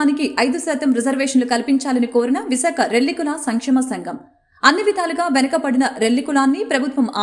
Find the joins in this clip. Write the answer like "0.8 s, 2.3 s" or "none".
none